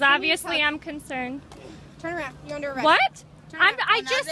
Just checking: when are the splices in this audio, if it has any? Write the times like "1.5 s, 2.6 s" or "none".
none